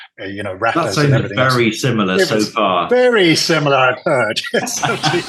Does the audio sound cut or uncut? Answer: uncut